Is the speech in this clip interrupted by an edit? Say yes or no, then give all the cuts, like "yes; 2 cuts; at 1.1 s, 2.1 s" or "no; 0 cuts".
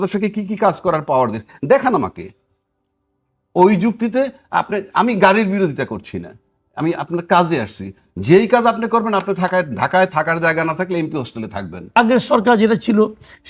yes; 1 cut; at 11.9 s